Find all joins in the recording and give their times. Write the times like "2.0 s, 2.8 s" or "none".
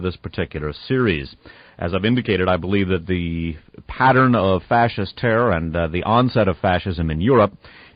6.0 s